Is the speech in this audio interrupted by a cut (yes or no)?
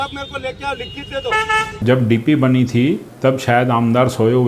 yes